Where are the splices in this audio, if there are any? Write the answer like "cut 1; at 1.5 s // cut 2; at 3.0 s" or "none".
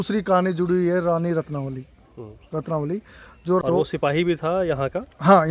cut 1; at 3.8 s